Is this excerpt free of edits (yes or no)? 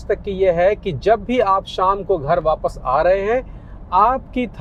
yes